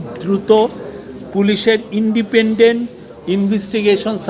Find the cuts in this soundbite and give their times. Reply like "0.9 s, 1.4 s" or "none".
none